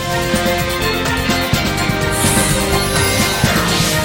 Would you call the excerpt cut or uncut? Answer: uncut